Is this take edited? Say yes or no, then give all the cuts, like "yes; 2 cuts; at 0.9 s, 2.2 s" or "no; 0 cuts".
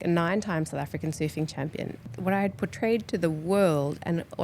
yes; 1 cut; at 2.0 s